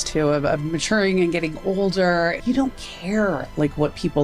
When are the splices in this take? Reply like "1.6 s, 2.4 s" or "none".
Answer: 2.4 s